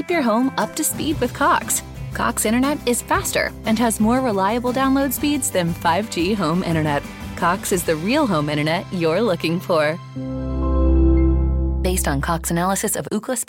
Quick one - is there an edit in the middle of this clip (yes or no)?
no